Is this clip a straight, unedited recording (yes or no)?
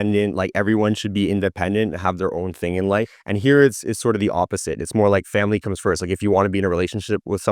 no